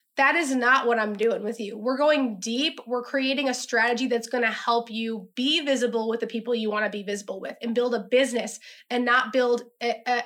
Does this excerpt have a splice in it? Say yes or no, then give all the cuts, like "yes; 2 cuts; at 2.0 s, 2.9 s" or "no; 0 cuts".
no; 0 cuts